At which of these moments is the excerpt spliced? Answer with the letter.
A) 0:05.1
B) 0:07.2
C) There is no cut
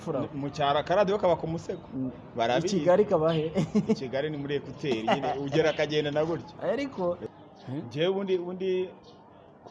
B